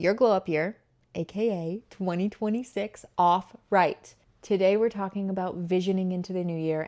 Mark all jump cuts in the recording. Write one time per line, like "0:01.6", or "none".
none